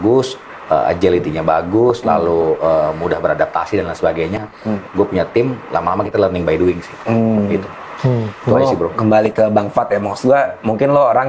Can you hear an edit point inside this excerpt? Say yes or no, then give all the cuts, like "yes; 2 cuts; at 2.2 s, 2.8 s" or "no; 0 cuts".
no; 0 cuts